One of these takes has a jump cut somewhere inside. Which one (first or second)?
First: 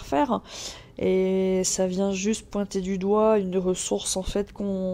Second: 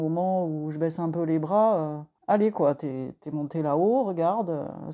second